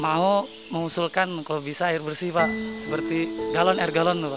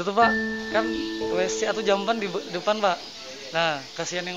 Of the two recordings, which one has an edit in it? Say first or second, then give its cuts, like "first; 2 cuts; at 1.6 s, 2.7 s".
first; 1 cut; at 2.7 s